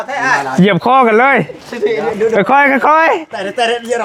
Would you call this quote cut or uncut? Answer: uncut